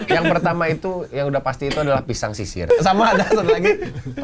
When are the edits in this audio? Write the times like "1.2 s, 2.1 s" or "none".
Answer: 2.6 s